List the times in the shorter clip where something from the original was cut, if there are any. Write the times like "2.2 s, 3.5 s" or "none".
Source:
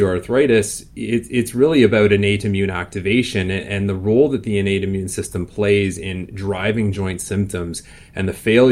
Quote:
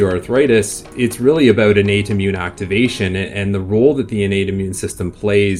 0.9 s